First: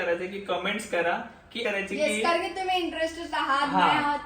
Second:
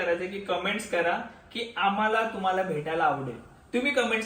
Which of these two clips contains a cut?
first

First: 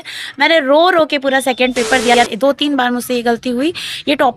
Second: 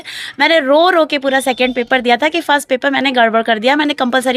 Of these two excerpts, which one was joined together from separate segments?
first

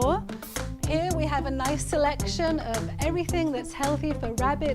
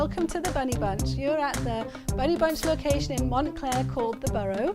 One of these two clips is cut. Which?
first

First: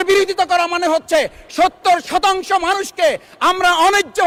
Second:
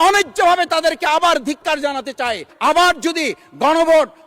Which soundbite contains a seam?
second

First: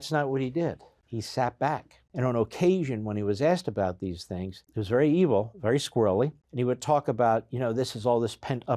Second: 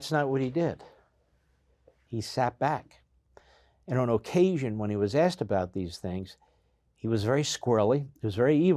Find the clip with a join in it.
first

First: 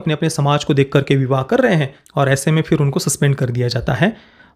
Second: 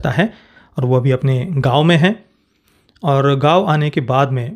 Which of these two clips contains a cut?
first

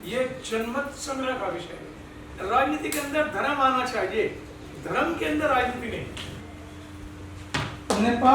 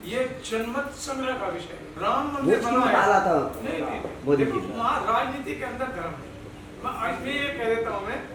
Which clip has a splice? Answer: first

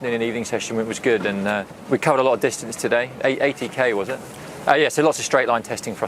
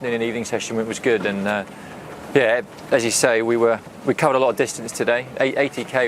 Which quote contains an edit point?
first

